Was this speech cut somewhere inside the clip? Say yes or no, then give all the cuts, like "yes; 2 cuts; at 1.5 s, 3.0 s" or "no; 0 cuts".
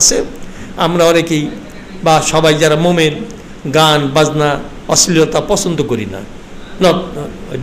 no; 0 cuts